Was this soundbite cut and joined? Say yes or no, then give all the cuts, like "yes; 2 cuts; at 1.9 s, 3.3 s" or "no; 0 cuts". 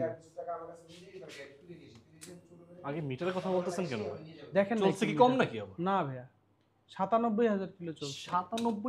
no; 0 cuts